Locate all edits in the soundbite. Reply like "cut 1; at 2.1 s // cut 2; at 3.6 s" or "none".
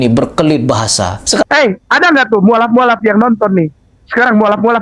cut 1; at 1.4 s